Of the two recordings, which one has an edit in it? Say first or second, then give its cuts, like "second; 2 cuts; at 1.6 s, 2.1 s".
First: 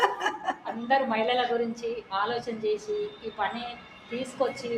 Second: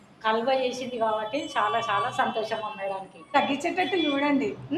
second; 1 cut; at 3.2 s